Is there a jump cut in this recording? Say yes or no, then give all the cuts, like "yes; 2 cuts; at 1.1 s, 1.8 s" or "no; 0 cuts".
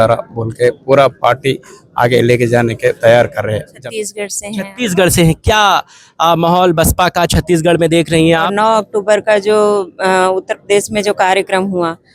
yes; 2 cuts; at 3.7 s, 8.5 s